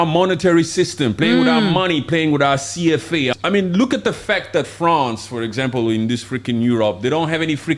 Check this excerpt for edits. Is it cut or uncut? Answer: cut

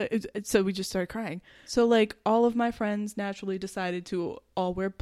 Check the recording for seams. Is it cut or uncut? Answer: cut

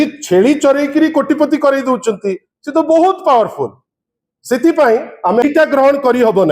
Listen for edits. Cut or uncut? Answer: cut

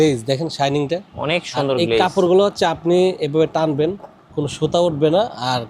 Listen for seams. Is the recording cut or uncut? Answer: uncut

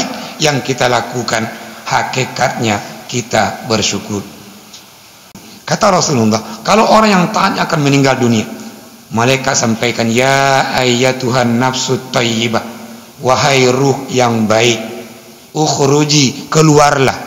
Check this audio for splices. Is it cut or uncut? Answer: cut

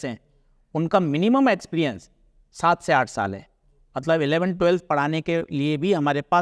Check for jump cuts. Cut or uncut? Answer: uncut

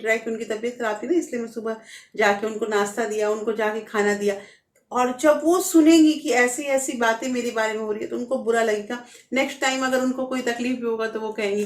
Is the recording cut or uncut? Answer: uncut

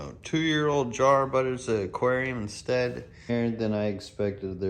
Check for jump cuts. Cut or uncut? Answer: cut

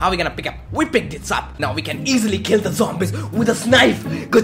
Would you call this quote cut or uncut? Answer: cut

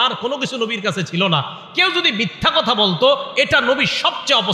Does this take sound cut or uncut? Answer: uncut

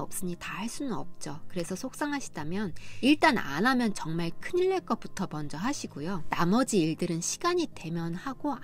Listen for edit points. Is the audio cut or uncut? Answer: uncut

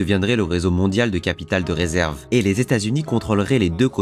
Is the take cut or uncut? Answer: cut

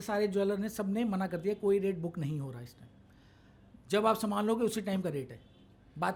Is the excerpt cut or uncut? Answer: uncut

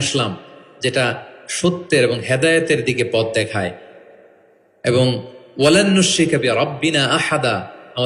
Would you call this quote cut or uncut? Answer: uncut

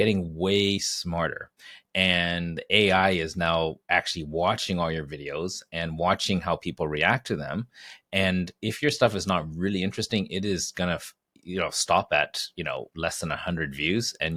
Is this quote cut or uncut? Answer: uncut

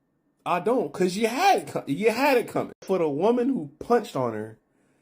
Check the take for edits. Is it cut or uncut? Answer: cut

